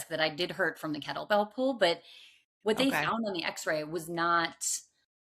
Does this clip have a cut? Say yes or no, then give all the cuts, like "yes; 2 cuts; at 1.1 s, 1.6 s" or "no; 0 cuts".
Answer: no; 0 cuts